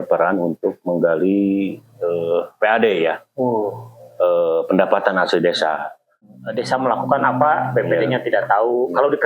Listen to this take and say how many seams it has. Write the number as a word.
one